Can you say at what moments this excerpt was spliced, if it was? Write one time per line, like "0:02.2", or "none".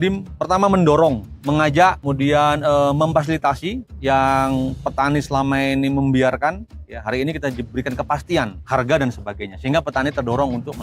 0:01.3
0:02.0
0:03.9
0:08.6